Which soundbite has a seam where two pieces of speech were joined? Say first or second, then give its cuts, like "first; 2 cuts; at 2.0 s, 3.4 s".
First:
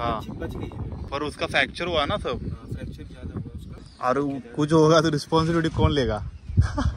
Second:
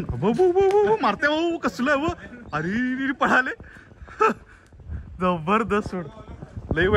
first; 2 cuts; at 1.0 s, 3.9 s